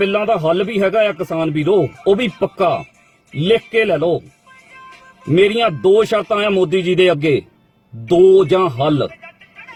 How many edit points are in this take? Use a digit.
0